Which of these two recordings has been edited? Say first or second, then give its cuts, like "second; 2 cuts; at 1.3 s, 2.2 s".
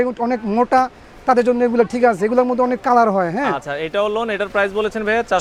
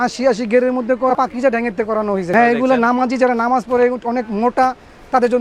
second; 2 cuts; at 1.1 s, 2.3 s